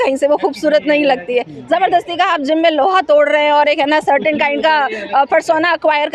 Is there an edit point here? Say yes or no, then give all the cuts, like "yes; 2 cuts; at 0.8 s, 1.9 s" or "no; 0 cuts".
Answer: no; 0 cuts